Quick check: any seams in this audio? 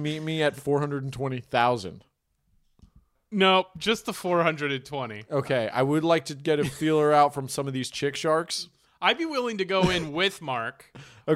no; 0 cuts

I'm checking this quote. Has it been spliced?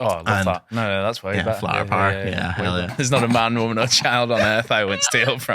yes; 1 cut; at 2.9 s

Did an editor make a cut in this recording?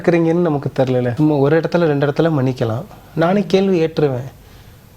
yes; 1 cut; at 1.1 s

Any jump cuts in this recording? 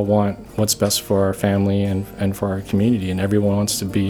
no; 0 cuts

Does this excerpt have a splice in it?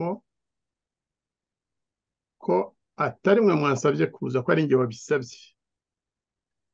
no; 0 cuts

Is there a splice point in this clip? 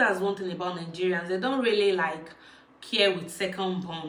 no; 0 cuts

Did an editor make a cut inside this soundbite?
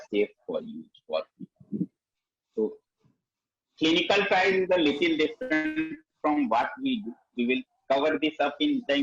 no; 0 cuts

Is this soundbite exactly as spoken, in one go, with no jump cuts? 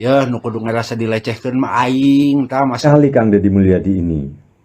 no; 1 cut; at 2.8 s

